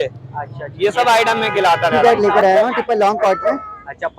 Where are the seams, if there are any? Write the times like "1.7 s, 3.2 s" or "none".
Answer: 2.0 s